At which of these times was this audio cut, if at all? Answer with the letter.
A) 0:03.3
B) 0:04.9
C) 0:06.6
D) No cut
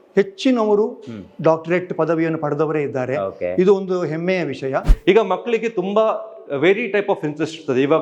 B